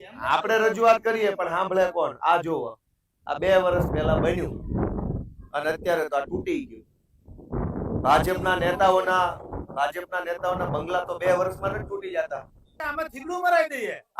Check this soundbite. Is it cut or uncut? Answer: cut